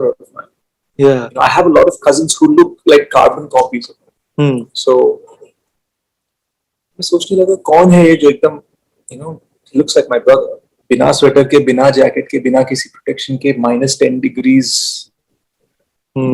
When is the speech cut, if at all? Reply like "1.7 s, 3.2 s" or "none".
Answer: 10.7 s